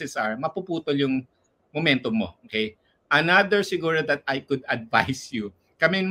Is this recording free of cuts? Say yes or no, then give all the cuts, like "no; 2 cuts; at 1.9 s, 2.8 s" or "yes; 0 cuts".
yes; 0 cuts